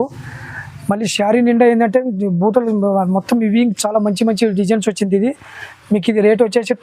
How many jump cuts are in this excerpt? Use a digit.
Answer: 0